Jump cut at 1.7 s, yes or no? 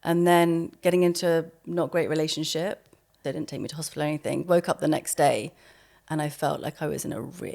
no